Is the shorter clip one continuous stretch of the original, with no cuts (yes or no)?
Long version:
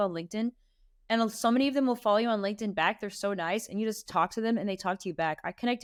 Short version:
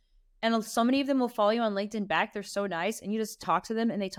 yes